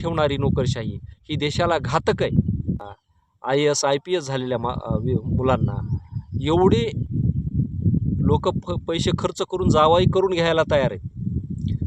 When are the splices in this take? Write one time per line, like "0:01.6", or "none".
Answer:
0:02.9